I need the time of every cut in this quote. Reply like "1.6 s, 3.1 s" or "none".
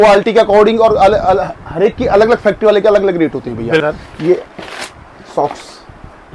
3.8 s